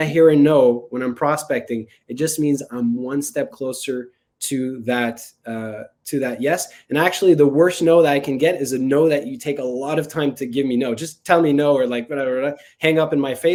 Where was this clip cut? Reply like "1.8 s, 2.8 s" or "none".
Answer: none

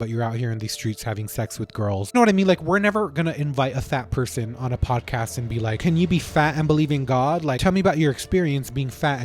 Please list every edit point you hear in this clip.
2.1 s, 5.8 s, 7.6 s

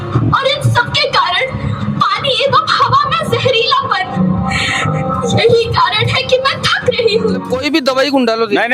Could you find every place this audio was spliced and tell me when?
7.4 s

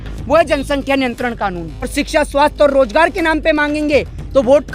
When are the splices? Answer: 1.9 s

